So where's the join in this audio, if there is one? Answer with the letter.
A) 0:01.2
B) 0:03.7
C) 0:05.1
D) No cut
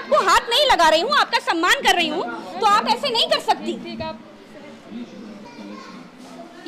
D